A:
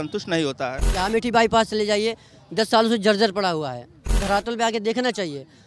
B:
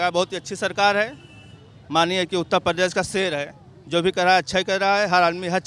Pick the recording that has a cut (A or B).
A